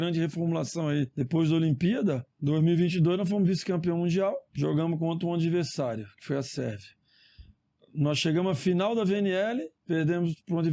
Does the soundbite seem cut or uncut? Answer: cut